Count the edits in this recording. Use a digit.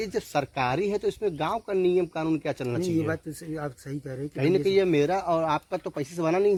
0